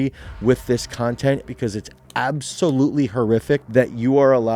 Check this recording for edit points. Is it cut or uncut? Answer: cut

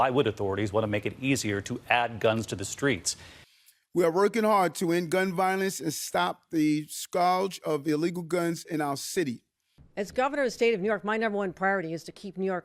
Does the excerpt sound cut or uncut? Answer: uncut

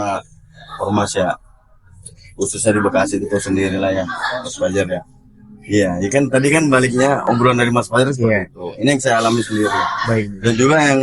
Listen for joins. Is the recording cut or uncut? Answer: uncut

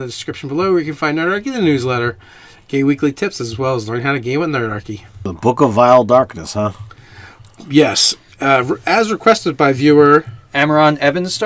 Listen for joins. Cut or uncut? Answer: uncut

